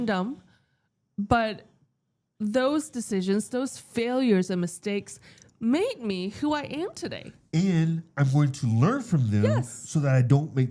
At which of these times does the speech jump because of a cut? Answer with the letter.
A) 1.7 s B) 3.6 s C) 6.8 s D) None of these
D